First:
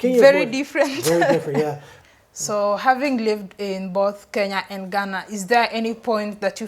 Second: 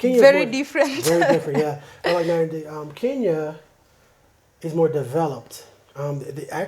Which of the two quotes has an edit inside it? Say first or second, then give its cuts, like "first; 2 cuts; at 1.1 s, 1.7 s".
first; 1 cut; at 1.9 s